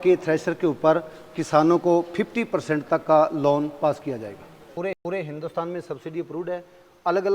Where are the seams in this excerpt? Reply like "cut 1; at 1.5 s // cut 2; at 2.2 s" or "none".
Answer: cut 1; at 4.8 s